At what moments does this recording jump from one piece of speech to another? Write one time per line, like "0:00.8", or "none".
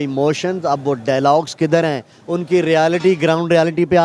none